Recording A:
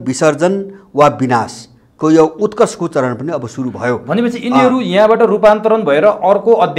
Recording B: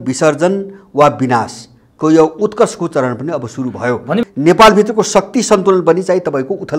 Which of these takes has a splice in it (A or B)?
B